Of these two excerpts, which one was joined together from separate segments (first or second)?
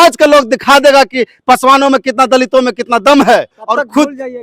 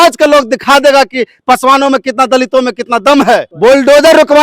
first